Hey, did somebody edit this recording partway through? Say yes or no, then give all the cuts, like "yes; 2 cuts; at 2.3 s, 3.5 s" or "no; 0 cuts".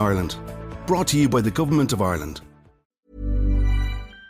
yes; 1 cut; at 3.1 s